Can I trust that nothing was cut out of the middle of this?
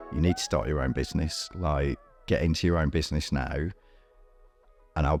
yes; 0 cuts

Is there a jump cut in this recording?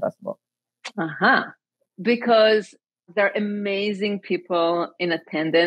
yes; 2 cuts; at 1.9 s, 3.1 s

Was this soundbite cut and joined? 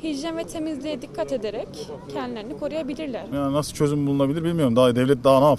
yes; 1 cut; at 3.3 s

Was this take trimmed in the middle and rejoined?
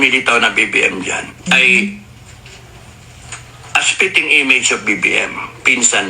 yes; 1 cut; at 1.3 s

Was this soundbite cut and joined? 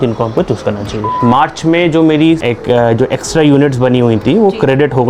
yes; 2 cuts; at 1.1 s, 2.4 s

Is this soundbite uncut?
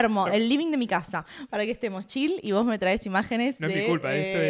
yes; 0 cuts

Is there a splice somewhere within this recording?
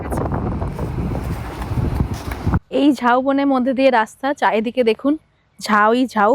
yes; 1 cut; at 2.6 s

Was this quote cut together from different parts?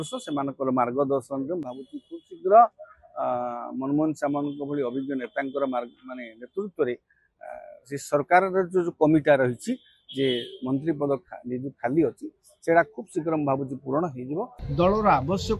yes; 1 cut; at 14.6 s

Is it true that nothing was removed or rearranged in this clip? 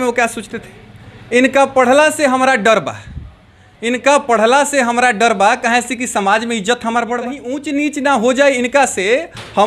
no; 1 cut; at 7.5 s

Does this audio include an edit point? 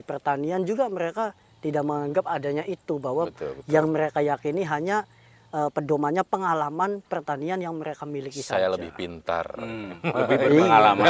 no; 0 cuts

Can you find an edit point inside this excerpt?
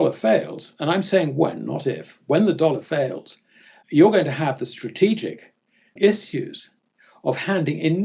yes; 2 cuts; at 3.7 s, 5.9 s

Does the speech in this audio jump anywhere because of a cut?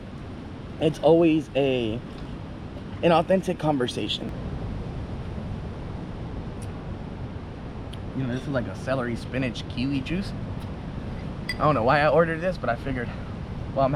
yes; 1 cut; at 4.3 s

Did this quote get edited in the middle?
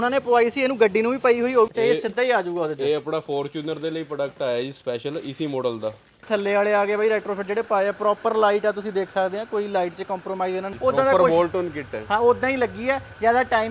yes; 3 cuts; at 1.7 s, 6.3 s, 10.7 s

